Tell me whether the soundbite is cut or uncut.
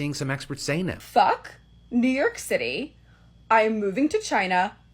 cut